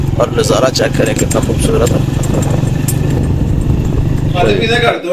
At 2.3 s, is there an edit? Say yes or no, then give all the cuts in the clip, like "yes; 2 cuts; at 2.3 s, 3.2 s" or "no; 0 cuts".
no; 1 cut; at 4.1 s